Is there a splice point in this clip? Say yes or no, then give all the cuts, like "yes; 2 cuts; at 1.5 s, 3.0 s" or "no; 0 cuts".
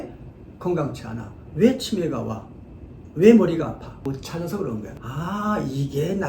yes; 2 cuts; at 3.9 s, 4.9 s